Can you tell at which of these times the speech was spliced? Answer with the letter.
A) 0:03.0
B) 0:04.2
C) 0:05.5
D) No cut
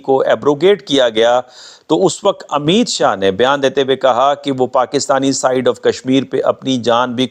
D